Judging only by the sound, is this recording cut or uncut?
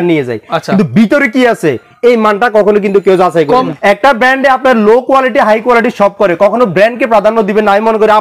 cut